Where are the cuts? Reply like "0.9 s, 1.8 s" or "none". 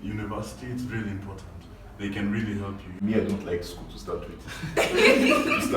2.9 s